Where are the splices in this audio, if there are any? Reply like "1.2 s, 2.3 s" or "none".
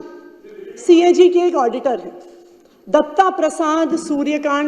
none